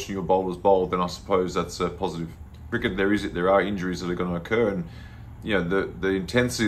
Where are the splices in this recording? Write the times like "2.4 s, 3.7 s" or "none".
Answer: 2.6 s